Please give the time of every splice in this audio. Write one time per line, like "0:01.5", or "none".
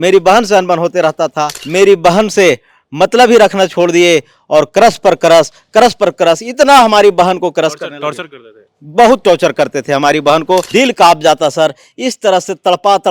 0:01.6
0:10.7